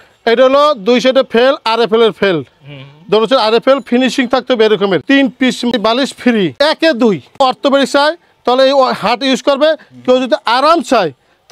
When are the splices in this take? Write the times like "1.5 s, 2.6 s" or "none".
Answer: 5.0 s, 6.5 s, 7.3 s